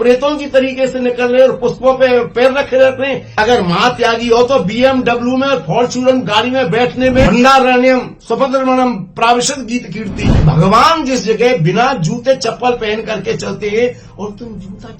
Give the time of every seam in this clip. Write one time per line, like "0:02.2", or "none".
0:03.3
0:07.3
0:10.3